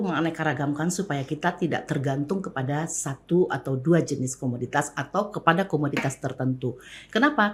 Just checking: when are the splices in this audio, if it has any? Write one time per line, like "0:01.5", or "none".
none

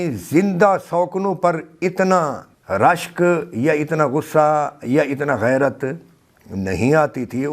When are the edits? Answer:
0:02.5

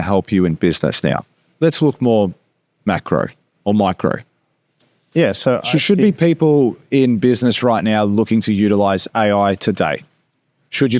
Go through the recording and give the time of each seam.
none

